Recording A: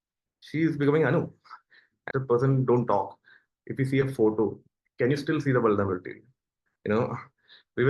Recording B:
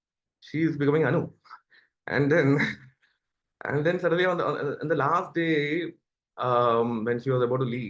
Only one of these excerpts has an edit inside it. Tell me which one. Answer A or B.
A